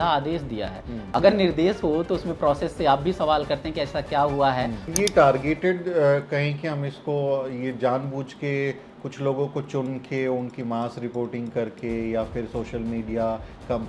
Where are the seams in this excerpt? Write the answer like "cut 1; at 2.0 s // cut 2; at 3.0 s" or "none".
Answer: cut 1; at 0.9 s // cut 2; at 4.9 s